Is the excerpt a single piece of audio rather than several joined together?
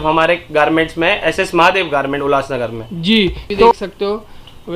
no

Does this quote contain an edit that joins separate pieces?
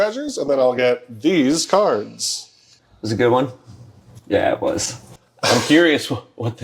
no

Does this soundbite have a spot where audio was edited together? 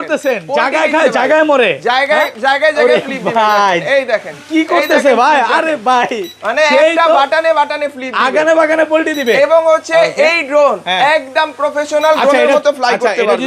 no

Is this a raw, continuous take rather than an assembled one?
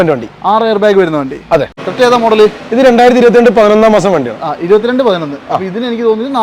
no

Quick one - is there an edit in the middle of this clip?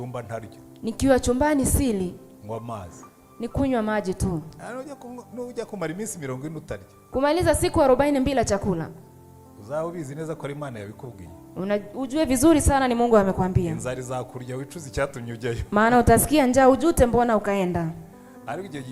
no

